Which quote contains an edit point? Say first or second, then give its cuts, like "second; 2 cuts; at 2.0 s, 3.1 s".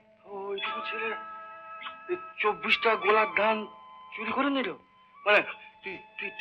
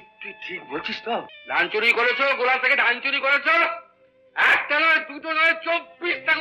second; 1 cut; at 1.4 s